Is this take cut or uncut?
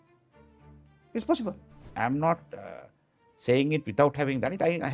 cut